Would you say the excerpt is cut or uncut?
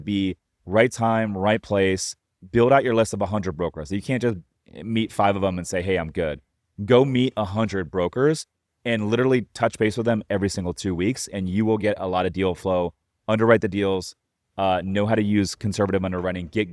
uncut